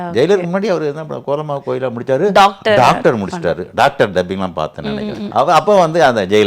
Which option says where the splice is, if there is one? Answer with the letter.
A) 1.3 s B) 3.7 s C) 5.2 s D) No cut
C